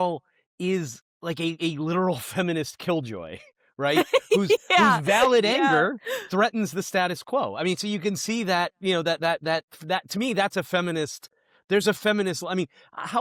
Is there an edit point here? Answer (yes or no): no